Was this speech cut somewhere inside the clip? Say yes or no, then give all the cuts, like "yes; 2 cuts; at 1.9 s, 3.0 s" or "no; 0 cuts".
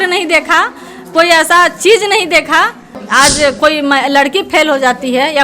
yes; 1 cut; at 3.2 s